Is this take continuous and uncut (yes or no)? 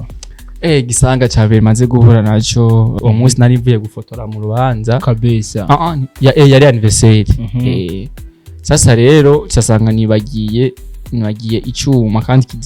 no